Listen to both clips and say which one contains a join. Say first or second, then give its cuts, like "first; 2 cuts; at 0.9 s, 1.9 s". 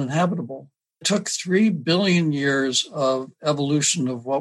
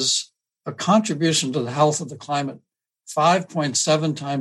first; 1 cut; at 1.0 s